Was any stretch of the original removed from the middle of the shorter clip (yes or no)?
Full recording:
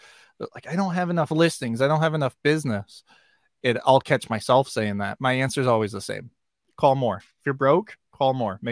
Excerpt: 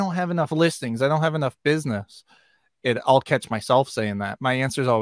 no